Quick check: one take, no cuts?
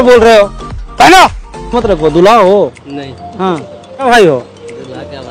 no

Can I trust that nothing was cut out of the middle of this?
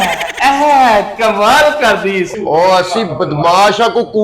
no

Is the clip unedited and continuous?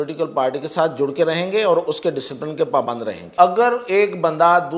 no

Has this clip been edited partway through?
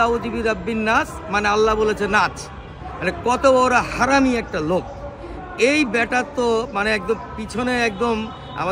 no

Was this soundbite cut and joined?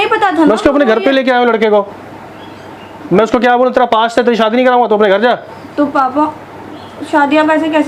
no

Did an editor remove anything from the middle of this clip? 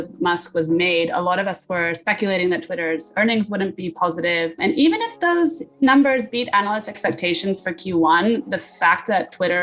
yes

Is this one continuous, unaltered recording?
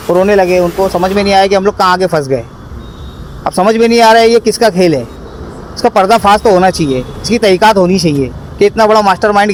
yes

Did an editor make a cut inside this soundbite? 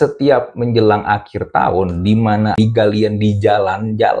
yes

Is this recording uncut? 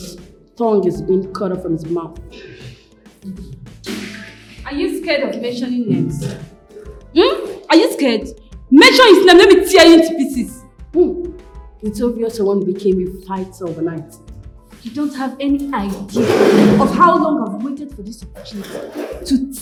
yes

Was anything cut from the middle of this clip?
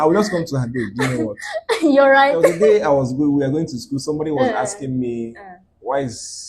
yes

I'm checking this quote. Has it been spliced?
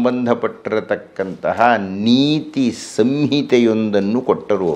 no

